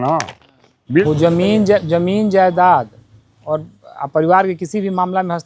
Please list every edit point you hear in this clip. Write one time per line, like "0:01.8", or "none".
0:01.0